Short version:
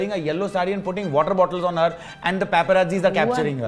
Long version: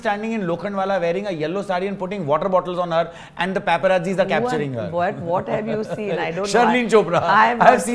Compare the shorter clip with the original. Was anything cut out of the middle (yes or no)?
no